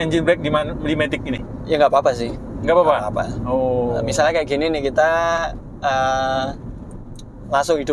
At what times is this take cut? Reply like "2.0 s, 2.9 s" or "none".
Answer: none